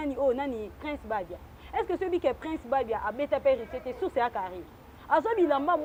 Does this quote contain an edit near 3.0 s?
no; 0 cuts

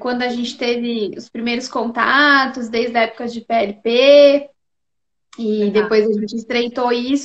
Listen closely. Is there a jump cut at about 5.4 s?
no; 1 cut; at 1.5 s

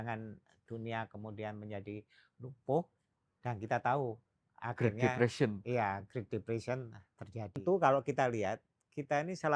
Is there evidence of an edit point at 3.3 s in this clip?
no; 1 cut; at 7.6 s

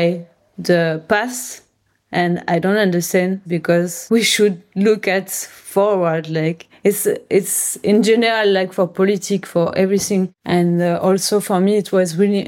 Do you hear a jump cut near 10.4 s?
yes; 2 cuts; at 3.7 s, 10.4 s

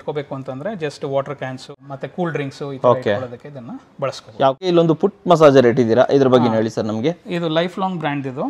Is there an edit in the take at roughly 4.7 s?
yes; 2 cuts; at 1.7 s, 4.7 s

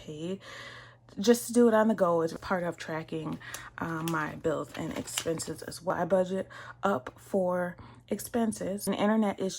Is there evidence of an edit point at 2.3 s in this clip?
yes; 3 cuts; at 2.3 s, 5.9 s, 8.9 s

